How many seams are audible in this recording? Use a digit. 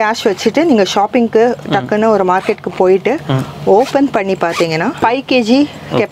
1